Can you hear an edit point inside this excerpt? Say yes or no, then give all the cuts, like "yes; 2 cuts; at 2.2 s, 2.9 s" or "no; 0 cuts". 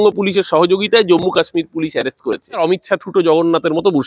yes; 1 cut; at 2.6 s